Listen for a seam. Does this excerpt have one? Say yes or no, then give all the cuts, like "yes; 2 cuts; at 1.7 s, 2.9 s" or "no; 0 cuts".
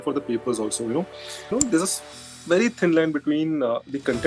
yes; 1 cut; at 1.5 s